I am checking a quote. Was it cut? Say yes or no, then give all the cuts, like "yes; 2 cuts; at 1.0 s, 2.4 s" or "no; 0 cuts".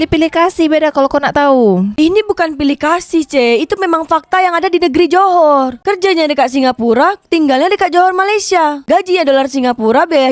no; 0 cuts